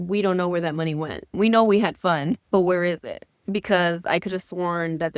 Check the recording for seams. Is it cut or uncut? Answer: cut